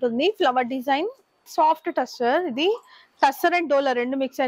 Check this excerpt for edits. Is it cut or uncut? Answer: cut